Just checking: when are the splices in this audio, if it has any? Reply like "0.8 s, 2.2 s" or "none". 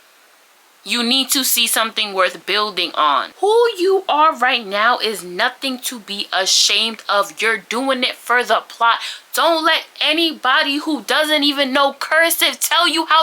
3.4 s